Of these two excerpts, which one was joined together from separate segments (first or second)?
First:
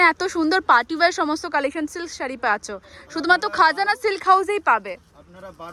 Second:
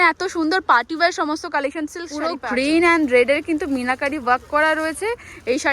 second